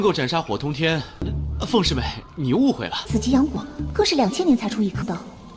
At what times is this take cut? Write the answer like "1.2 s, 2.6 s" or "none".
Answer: 3.0 s